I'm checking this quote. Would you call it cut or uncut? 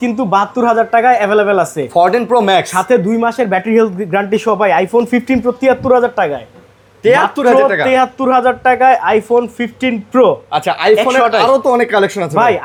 uncut